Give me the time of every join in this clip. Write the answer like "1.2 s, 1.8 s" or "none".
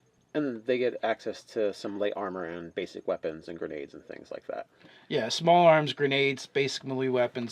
1.3 s